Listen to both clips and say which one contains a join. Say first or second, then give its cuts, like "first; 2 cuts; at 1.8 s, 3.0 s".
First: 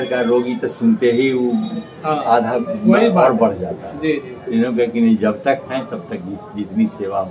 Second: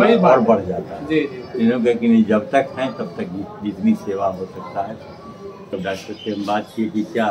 second; 1 cut; at 5.7 s